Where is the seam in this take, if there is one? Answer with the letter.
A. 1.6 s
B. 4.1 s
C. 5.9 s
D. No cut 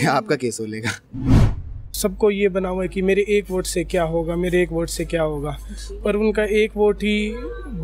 A